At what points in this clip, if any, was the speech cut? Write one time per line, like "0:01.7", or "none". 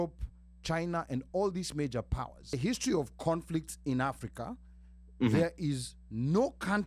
0:02.6